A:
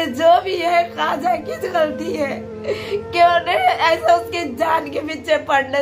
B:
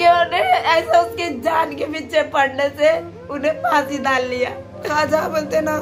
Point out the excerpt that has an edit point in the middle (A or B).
B